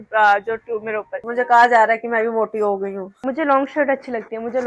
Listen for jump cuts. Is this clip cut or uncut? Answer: cut